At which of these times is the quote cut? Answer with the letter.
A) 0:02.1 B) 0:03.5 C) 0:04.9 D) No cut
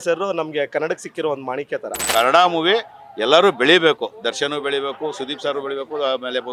A